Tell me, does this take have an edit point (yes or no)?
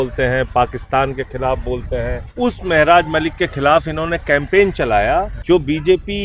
yes